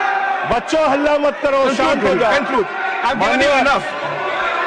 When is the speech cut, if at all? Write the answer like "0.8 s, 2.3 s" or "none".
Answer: none